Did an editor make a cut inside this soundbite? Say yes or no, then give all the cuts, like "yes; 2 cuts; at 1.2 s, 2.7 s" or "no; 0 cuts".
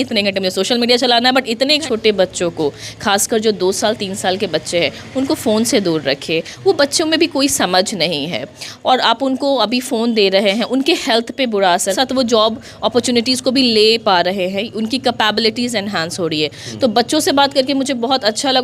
yes; 2 cuts; at 1.8 s, 11.9 s